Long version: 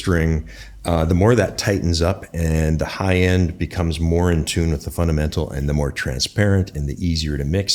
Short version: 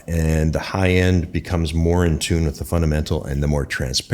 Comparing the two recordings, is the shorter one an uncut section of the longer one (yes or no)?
yes